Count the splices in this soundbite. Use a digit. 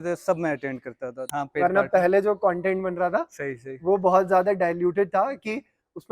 1